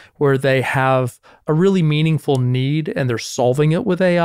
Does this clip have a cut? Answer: no; 0 cuts

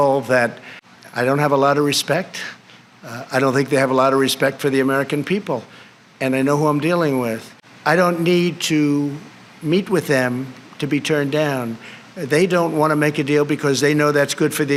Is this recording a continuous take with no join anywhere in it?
yes; 0 cuts

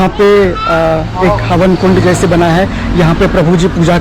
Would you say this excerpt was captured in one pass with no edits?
yes; 0 cuts

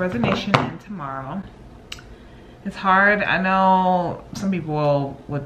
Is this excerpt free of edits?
yes; 0 cuts

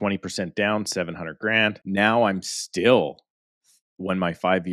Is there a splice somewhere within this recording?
yes; 1 cut; at 1.8 s

